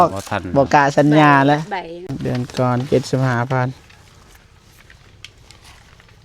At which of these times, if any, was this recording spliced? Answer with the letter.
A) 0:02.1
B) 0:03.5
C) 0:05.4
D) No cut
A